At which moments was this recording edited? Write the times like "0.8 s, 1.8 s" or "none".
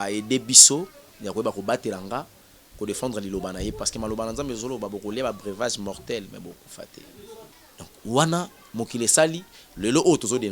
7.5 s